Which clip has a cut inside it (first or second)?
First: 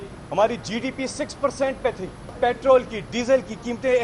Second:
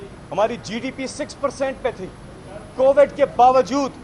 first